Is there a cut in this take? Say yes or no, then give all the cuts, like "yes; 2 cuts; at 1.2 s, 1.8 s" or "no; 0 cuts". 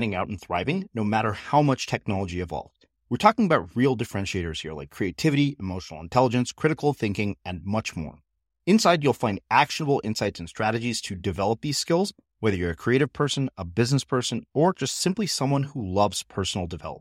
no; 0 cuts